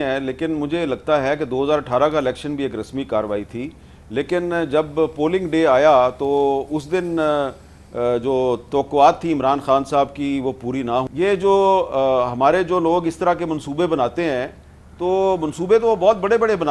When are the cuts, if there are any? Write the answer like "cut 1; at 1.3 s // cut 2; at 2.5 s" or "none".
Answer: cut 1; at 11.1 s